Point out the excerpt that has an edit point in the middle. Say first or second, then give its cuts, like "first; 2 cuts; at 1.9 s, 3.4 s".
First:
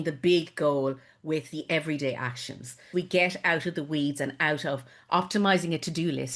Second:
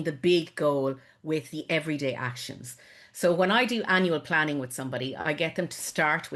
first; 1 cut; at 2.7 s